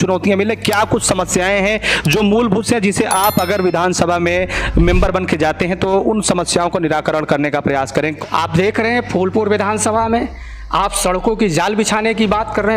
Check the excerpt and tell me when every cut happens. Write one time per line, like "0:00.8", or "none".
0:08.2